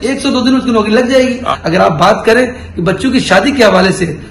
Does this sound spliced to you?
yes; 1 cut; at 1.7 s

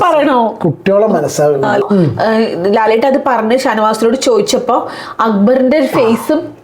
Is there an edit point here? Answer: yes; 1 cut; at 1.8 s

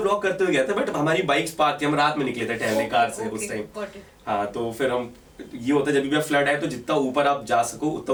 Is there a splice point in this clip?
no; 0 cuts

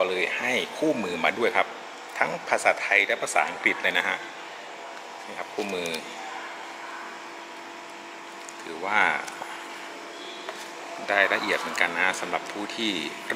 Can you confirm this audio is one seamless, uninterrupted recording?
yes; 0 cuts

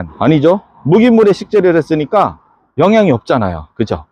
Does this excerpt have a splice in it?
no; 0 cuts

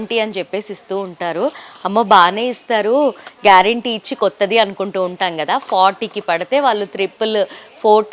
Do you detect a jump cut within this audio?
no; 0 cuts

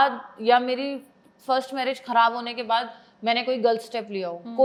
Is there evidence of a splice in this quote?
no; 0 cuts

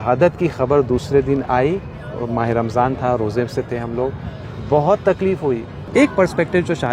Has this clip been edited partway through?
yes; 1 cut; at 5.8 s

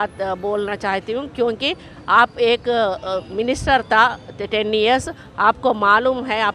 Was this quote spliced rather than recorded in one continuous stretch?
no; 0 cuts

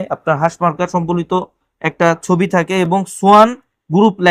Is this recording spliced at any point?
no; 0 cuts

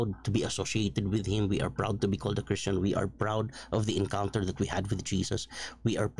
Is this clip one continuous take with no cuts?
yes; 0 cuts

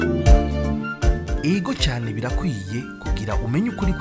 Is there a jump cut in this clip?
yes; 1 cut; at 1.1 s

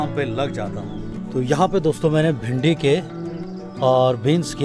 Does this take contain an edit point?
yes; 1 cut; at 1.1 s

